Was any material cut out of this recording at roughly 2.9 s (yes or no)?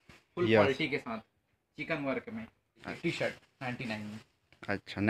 yes